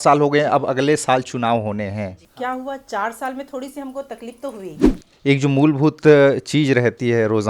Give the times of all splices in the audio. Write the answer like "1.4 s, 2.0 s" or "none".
2.2 s, 4.9 s

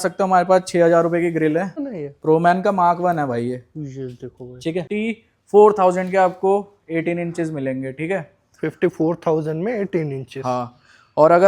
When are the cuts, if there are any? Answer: 1.7 s, 4.9 s

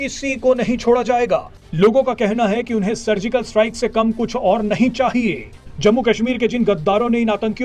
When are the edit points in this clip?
1.6 s

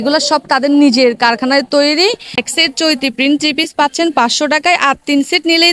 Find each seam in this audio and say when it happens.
2.4 s

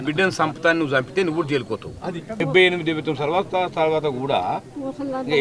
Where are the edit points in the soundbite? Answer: 2.4 s

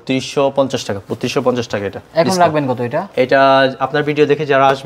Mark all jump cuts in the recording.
none

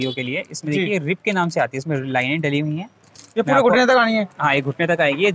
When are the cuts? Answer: none

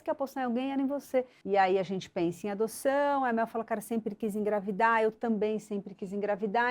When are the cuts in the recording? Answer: 1.4 s

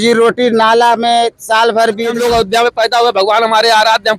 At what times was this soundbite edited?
2.2 s

